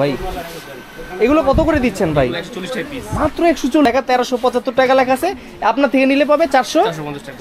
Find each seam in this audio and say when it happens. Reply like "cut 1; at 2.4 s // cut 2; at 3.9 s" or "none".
cut 1; at 3.9 s